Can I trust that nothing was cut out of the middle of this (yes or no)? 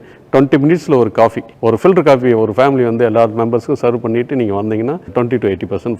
no